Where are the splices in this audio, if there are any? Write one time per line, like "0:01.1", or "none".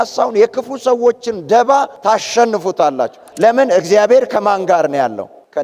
0:03.2